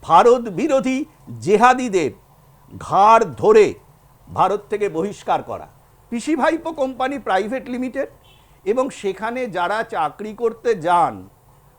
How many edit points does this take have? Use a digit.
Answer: 1